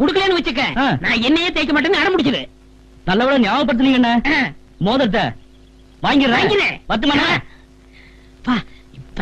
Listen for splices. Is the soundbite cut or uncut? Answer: uncut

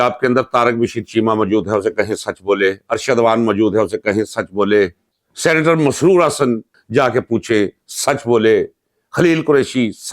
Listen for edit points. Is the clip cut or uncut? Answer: cut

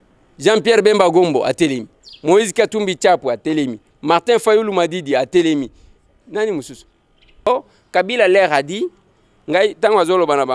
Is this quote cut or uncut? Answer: cut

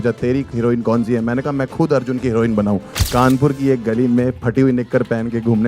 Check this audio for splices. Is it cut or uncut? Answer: cut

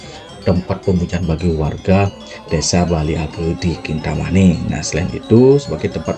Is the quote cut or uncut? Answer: uncut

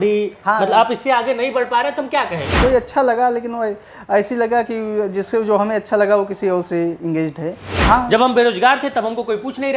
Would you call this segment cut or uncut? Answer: cut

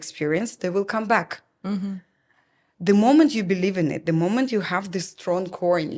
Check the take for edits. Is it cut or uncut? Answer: uncut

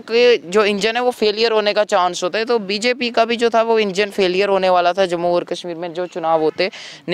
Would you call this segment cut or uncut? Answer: uncut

